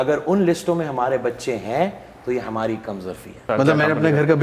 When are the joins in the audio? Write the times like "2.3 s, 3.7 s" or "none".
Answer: 3.4 s